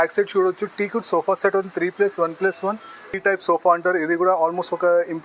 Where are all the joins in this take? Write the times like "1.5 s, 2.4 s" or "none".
3.1 s